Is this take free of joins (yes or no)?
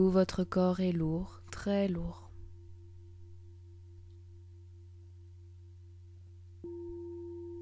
yes